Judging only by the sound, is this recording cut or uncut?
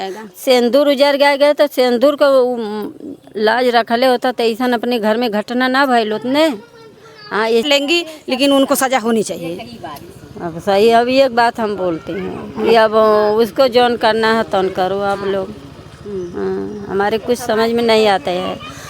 cut